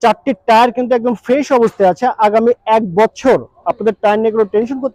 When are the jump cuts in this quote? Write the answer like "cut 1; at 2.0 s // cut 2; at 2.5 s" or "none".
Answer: none